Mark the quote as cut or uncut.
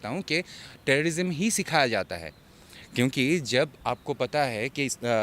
uncut